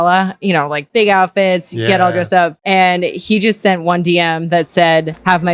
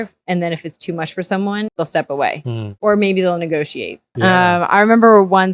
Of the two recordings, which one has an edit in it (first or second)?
second